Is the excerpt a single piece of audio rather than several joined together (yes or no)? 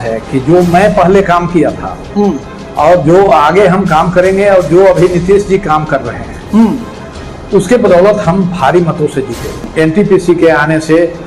no